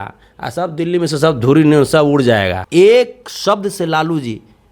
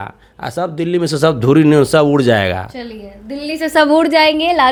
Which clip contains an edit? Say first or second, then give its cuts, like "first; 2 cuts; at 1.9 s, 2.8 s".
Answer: first; 1 cut; at 2.6 s